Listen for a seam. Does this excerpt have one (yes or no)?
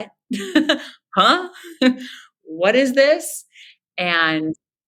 no